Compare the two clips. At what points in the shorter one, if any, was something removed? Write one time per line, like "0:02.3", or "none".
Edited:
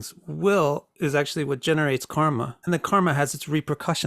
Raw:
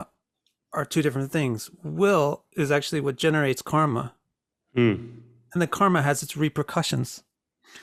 0:02.5

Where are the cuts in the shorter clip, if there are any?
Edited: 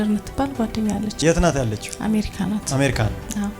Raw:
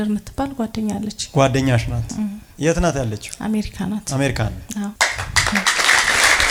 0:01.1

